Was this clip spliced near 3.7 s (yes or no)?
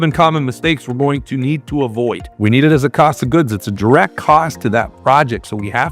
no